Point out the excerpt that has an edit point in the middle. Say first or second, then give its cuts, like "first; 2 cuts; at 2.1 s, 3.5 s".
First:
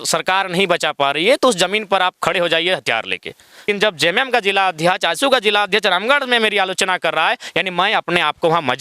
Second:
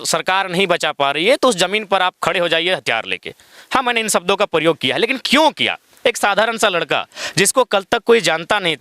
first; 1 cut; at 3.6 s